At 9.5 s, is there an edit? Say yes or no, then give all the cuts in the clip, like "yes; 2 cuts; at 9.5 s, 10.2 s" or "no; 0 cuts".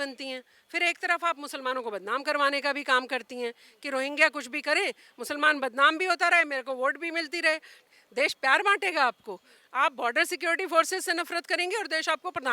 no; 1 cut; at 7.7 s